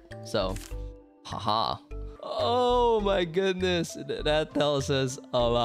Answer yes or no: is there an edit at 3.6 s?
no